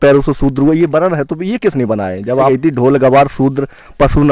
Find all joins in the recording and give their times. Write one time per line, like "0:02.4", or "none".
0:02.5